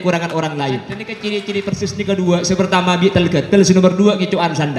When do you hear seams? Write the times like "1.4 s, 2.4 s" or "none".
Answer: 1.1 s